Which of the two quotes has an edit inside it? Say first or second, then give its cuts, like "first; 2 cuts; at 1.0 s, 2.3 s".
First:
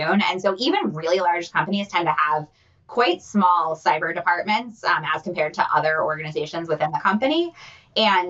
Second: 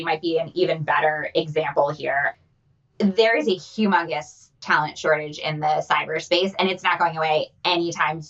second; 1 cut; at 2.3 s